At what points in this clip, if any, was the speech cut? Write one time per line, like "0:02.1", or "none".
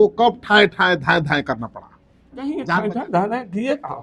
0:02.6